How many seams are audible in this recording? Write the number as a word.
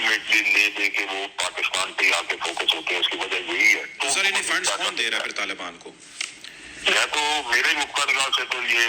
one